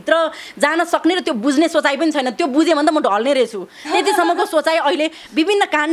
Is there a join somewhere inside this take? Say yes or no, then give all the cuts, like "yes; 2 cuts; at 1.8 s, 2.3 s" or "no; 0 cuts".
no; 0 cuts